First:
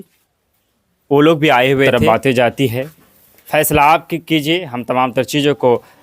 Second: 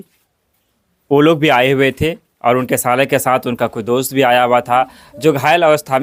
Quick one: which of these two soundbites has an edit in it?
first; 1 cut; at 1.9 s

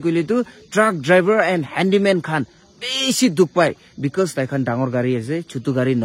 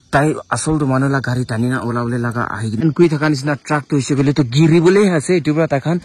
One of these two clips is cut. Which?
second; 1 cut; at 2.8 s

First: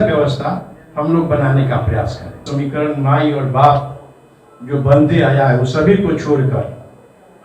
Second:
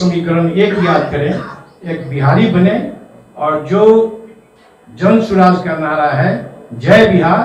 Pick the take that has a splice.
first; 1 cut; at 2.5 s

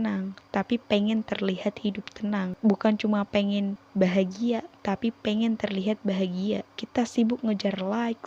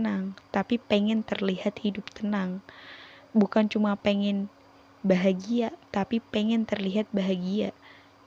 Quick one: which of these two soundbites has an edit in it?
first; 3 cuts; at 2.5 s, 3.8 s, 6.8 s

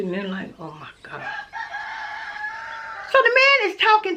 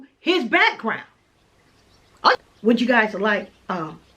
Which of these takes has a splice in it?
second; 1 cut; at 2.4 s

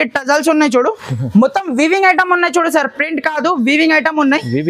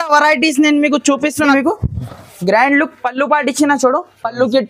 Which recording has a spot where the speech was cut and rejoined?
second; 1 cut; at 1.5 s

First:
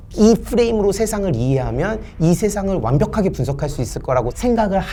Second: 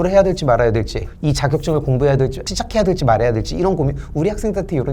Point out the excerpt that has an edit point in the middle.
second; 2 cuts; at 1.0 s, 2.4 s

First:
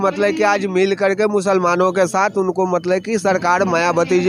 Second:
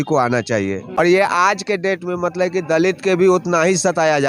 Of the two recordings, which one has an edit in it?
second; 1 cut; at 1.0 s

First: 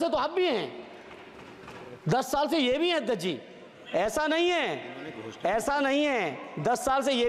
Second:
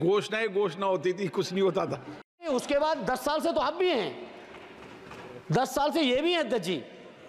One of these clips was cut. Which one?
second; 1 cut; at 2.5 s

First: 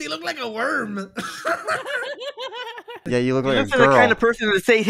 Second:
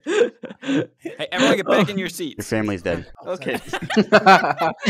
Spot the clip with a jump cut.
first; 1 cut; at 3.0 s

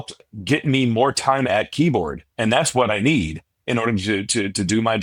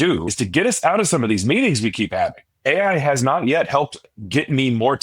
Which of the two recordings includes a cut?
second; 1 cut; at 2.5 s

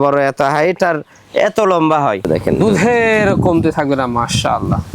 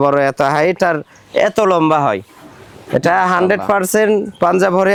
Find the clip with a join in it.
first; 1 cut; at 2.3 s

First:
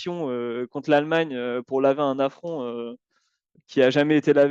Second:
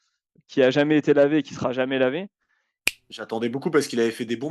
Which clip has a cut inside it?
second; 1 cut; at 2.8 s

